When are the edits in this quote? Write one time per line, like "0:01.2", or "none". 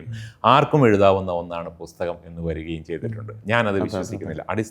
none

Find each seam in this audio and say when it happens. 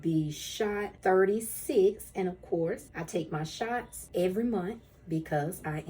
0:00.9
0:02.9
0:04.0

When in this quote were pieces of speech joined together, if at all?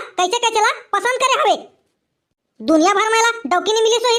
none

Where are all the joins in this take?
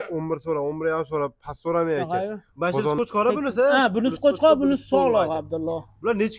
0:03.0

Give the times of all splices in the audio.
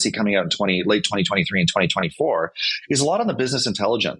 none

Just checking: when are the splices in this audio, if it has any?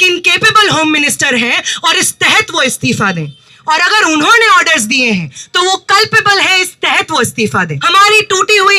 0:07.8

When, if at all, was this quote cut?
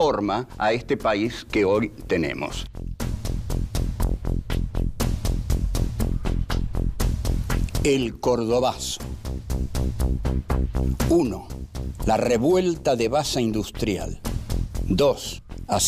0:08.8

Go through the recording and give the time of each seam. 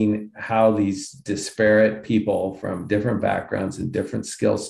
none

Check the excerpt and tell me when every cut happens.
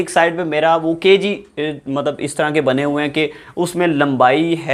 none

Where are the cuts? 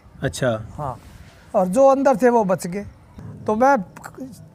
0:03.1

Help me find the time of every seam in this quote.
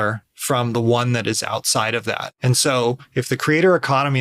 0:02.3

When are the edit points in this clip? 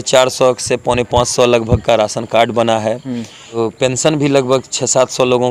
0:03.5

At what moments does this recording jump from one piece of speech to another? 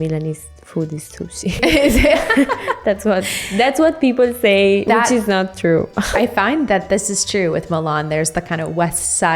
0:01.6
0:04.8
0:06.1

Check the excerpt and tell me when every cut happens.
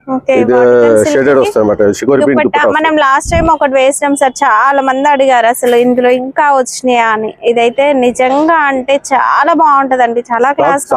none

